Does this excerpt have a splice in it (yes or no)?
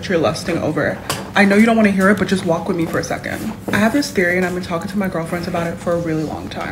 yes